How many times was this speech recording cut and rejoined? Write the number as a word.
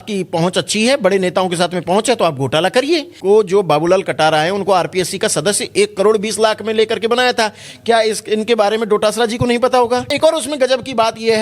two